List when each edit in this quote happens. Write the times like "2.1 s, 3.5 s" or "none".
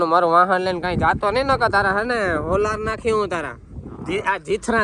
none